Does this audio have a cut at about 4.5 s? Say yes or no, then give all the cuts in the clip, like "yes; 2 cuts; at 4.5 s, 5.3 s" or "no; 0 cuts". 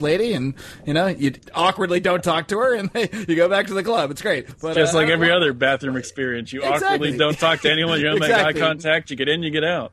yes; 2 cuts; at 1.4 s, 4.5 s